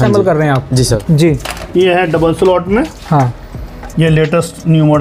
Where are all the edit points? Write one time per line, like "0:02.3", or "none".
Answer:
0:01.0